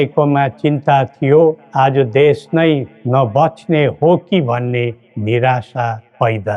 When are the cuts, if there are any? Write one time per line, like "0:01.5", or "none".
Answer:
none